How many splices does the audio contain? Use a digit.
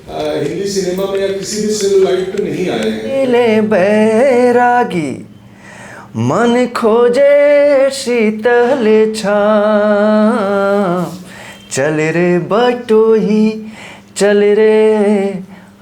1